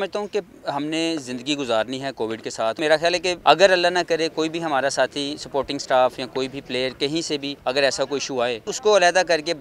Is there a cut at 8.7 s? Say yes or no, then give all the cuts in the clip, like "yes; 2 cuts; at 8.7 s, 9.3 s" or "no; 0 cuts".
yes; 3 cuts; at 3.1 s, 7.5 s, 8.7 s